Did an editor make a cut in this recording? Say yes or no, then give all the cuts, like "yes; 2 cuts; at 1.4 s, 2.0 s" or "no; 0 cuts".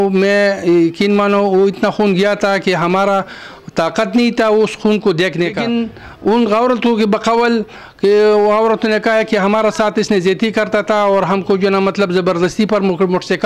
yes; 1 cut; at 5.6 s